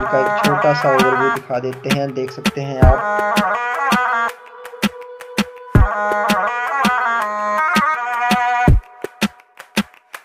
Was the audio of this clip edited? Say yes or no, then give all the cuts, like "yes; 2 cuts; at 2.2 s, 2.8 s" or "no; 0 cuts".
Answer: no; 0 cuts